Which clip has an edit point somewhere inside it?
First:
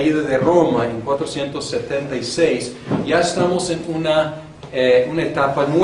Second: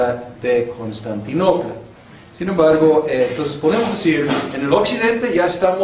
second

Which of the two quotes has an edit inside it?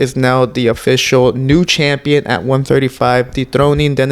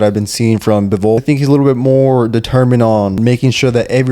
second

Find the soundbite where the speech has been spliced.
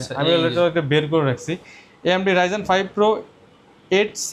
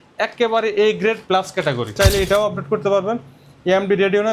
second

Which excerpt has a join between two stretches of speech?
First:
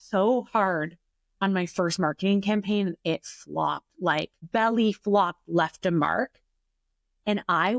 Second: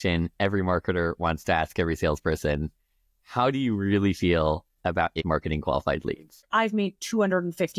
second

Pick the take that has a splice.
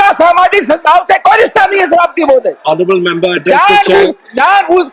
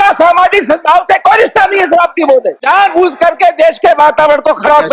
second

